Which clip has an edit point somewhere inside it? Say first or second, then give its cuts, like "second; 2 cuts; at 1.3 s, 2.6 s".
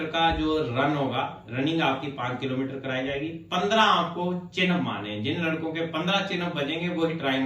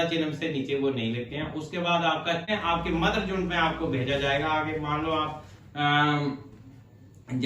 second; 1 cut; at 2.5 s